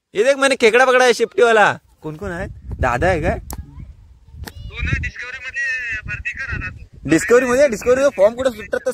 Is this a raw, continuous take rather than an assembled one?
yes; 0 cuts

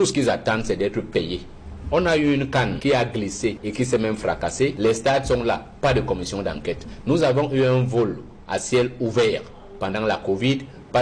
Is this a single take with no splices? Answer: yes; 0 cuts

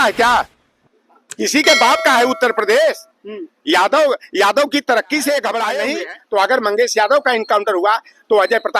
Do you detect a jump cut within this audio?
yes; 1 cut; at 5.9 s

